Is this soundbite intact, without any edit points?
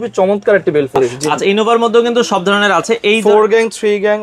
no; 1 cut; at 1.0 s

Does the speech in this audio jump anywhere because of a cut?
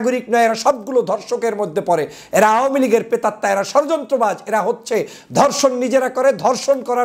no; 0 cuts

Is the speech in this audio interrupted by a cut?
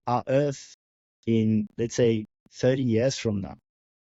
no; 0 cuts

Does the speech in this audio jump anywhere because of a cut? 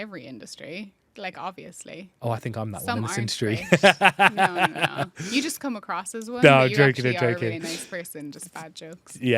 no; 0 cuts

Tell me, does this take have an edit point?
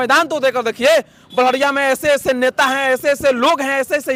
no; 0 cuts

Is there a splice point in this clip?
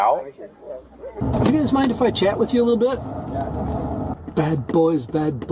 yes; 2 cuts; at 1.2 s, 4.1 s

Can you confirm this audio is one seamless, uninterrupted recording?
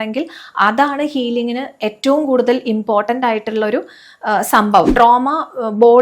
no; 1 cut; at 4.9 s

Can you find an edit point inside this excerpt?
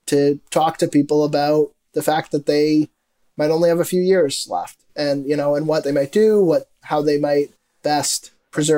no; 0 cuts

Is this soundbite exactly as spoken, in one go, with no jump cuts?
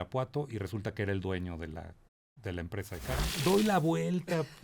no; 1 cut; at 3.4 s

